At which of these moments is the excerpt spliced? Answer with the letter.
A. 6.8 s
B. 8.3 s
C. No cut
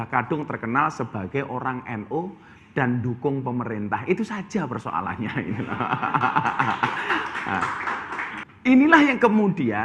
B